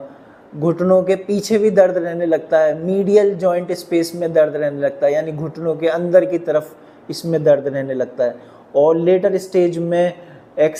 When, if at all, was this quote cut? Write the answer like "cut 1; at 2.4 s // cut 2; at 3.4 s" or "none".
none

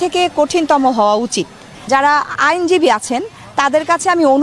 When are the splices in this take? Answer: cut 1; at 1.9 s

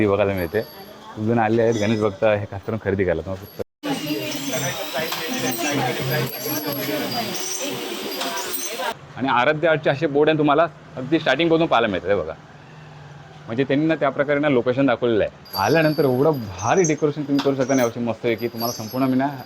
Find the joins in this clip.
cut 1; at 8.9 s // cut 2; at 15.4 s

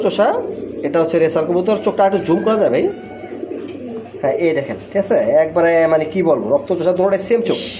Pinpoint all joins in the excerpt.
none

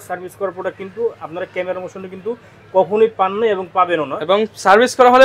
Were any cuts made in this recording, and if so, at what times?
none

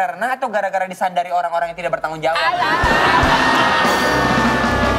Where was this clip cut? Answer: none

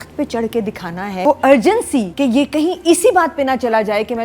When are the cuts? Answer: cut 1; at 1.2 s // cut 2; at 2.1 s

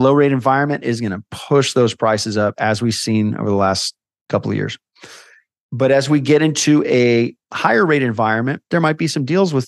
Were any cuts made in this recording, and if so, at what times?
cut 1; at 8.7 s

